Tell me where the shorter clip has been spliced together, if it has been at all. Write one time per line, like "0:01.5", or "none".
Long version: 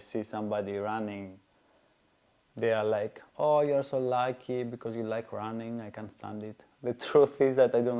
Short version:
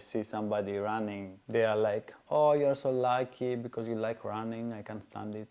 0:01.3